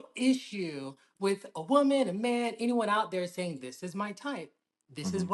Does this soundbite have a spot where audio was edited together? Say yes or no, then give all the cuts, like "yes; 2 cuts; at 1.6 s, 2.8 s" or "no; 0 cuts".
no; 0 cuts